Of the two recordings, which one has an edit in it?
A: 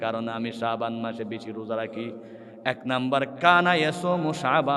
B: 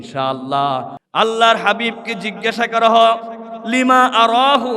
B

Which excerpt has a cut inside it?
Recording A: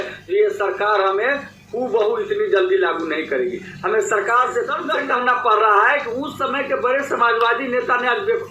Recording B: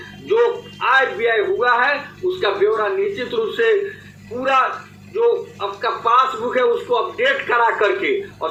A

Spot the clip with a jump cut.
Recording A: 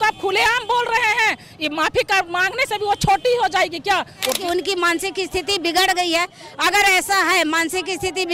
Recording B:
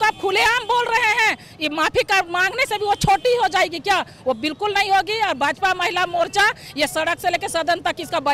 A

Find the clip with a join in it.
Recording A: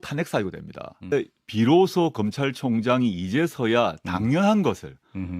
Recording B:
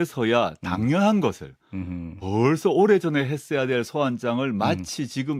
A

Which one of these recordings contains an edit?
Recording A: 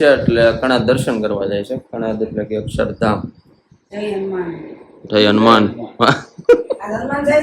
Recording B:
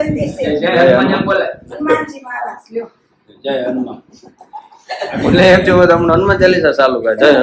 A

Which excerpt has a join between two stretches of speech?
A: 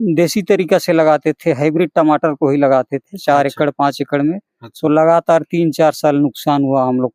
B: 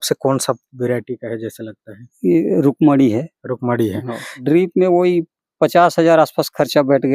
B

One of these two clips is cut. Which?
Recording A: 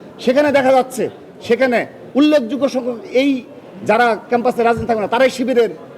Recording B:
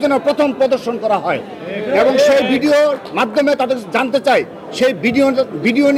A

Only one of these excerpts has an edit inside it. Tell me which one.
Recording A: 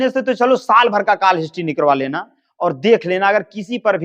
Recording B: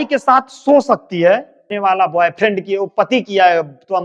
B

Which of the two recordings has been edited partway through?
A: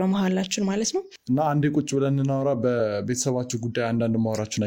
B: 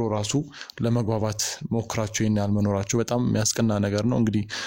A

